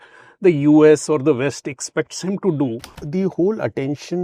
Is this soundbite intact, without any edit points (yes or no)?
no